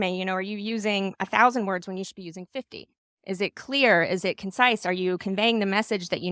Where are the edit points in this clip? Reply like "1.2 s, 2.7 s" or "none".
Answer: none